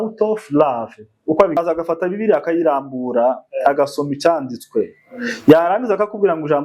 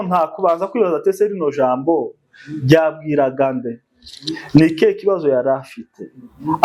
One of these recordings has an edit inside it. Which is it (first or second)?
first